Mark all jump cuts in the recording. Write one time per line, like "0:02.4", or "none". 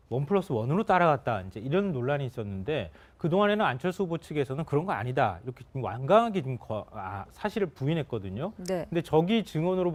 none

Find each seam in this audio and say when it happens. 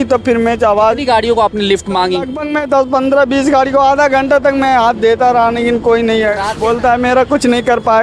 0:06.5

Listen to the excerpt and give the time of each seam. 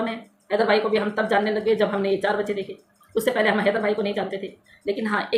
none

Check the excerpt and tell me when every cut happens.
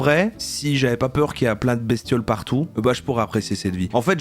0:02.7

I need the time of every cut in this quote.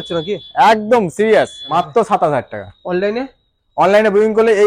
0:01.6

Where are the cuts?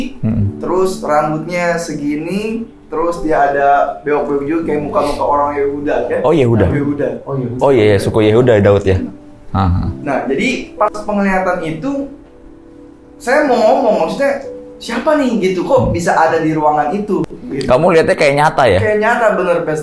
none

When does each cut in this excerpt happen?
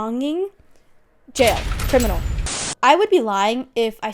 0:02.4

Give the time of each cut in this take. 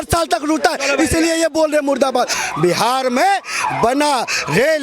0:02.4

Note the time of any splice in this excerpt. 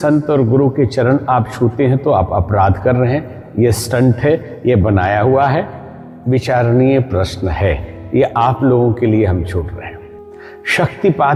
none

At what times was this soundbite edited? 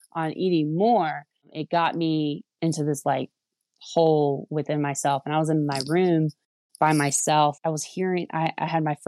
0:01.5
0:02.5
0:07.6

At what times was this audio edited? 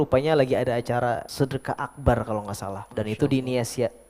0:01.3
0:02.8

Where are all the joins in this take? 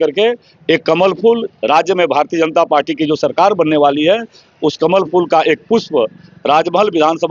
none

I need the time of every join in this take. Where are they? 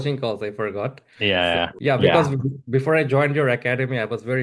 none

